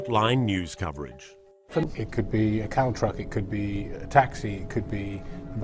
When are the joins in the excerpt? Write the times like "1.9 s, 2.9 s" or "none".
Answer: 1.8 s

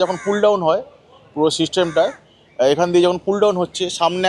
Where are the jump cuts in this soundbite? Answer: none

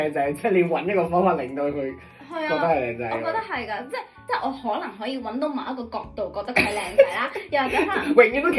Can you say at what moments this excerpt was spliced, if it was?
4.1 s

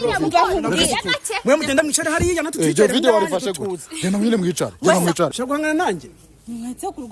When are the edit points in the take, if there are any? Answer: 5.3 s

